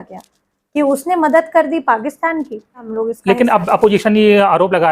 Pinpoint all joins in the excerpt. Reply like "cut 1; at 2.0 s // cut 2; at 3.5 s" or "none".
cut 1; at 2.9 s